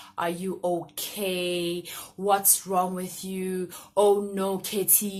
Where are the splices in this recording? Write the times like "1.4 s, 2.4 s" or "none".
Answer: none